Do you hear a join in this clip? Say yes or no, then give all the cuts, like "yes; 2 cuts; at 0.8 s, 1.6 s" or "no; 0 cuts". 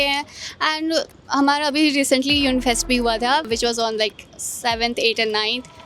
no; 0 cuts